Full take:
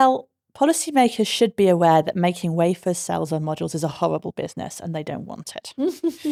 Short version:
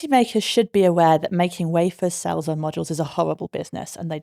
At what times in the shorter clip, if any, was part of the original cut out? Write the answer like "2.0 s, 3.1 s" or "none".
none